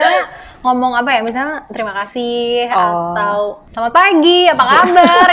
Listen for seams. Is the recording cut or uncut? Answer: cut